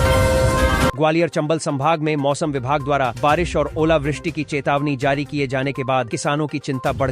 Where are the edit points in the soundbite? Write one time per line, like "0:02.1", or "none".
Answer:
0:00.9